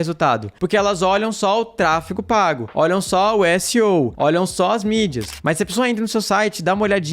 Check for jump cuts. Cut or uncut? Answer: cut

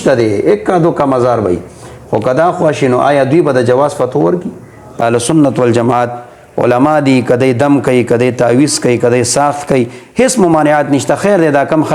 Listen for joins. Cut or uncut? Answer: cut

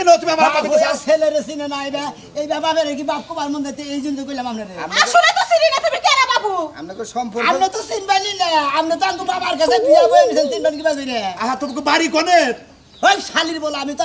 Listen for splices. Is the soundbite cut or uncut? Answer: uncut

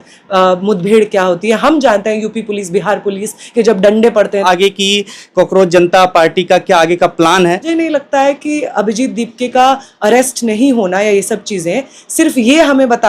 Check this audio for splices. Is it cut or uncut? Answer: cut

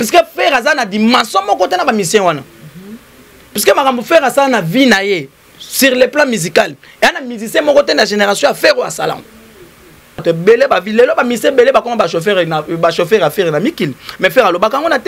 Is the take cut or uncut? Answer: cut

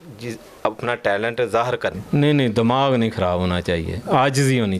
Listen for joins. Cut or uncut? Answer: cut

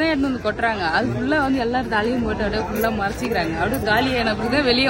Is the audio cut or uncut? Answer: uncut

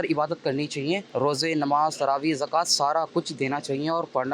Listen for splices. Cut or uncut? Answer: cut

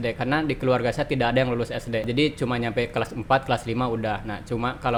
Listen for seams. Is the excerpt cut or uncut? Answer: uncut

